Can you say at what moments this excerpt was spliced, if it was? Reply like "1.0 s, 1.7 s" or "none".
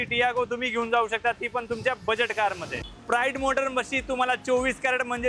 2.8 s